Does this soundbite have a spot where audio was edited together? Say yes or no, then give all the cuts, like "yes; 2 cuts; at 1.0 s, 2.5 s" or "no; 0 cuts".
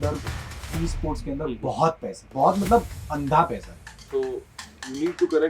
yes; 1 cut; at 4.0 s